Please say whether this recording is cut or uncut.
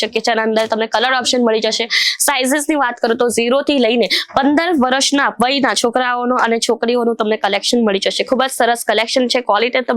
uncut